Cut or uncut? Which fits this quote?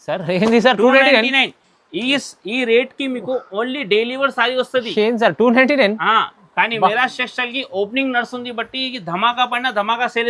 uncut